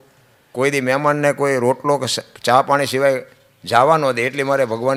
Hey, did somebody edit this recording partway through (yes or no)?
no